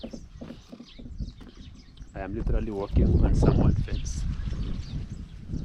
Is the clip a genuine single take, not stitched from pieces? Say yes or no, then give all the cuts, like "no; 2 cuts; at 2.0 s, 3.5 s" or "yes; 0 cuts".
yes; 0 cuts